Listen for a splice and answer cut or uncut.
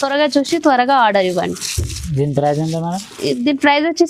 uncut